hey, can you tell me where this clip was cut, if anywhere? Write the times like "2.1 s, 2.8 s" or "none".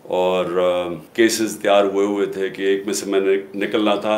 1.0 s